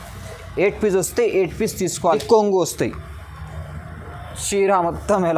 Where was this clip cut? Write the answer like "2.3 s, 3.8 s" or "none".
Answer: 2.2 s